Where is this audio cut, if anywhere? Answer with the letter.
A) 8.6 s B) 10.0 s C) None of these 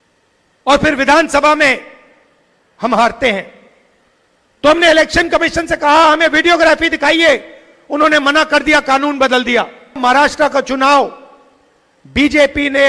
B